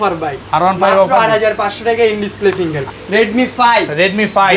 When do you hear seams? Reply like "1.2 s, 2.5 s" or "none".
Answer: 2.9 s